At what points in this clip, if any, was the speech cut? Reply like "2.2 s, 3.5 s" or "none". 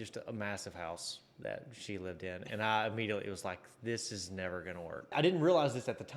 5.1 s